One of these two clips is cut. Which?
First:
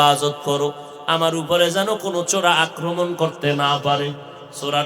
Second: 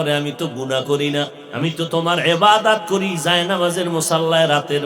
second; 1 cut; at 1.4 s

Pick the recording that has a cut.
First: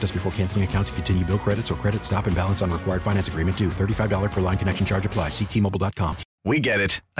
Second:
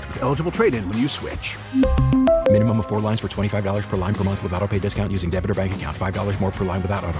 first; 1 cut; at 6.2 s

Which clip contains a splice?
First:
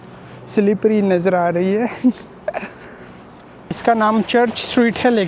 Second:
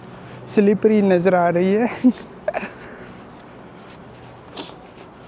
first; 1 cut; at 3.7 s

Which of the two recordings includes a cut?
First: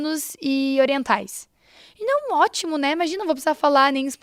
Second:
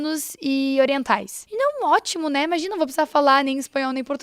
second; 1 cut; at 1.4 s

